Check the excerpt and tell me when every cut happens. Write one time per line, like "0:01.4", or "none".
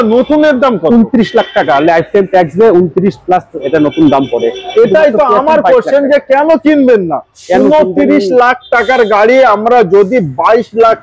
none